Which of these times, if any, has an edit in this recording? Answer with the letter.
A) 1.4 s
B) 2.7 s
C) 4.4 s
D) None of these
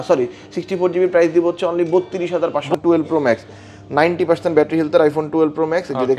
B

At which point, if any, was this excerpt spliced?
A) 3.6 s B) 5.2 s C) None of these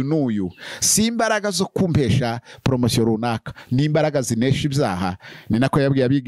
C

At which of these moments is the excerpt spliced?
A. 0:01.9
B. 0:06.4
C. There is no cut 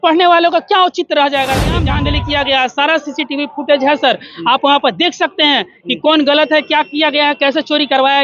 A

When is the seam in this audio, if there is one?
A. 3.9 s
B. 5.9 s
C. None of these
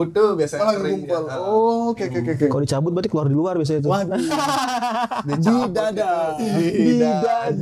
C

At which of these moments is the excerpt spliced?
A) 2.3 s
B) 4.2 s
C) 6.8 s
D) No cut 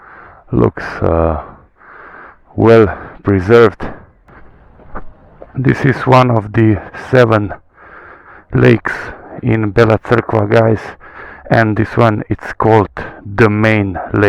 B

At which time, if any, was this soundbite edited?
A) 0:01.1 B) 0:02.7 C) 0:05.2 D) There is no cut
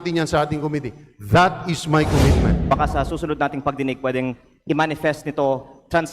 B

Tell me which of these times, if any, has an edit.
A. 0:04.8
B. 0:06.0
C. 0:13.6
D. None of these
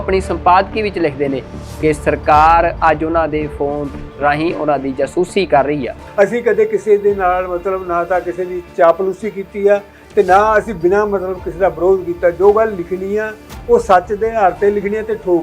B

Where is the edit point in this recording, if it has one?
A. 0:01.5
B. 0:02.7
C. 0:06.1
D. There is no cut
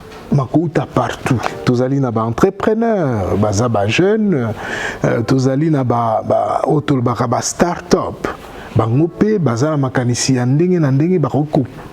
A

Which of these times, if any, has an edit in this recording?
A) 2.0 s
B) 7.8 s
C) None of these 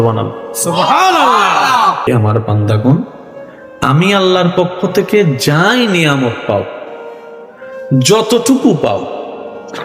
A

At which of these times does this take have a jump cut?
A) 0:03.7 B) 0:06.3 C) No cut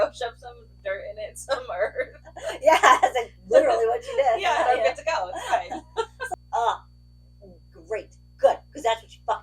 B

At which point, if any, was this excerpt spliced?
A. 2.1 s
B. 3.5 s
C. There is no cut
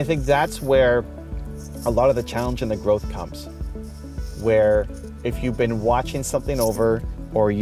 C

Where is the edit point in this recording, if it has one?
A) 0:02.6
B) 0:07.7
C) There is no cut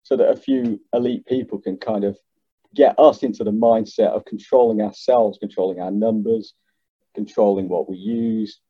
A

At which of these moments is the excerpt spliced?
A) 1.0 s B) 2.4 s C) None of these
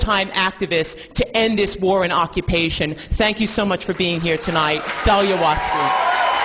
A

